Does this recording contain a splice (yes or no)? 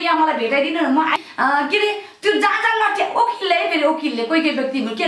yes